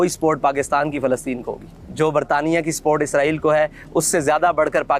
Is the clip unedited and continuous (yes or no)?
yes